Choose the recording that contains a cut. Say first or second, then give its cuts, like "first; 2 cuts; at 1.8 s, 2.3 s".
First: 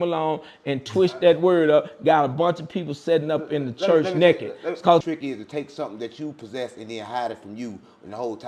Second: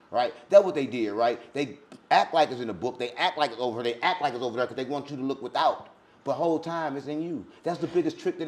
first; 1 cut; at 5.0 s